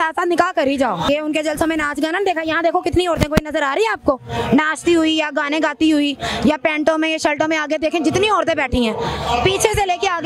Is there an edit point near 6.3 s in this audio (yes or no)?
no